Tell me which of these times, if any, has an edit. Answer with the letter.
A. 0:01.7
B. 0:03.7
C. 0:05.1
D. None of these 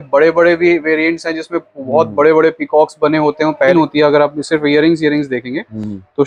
B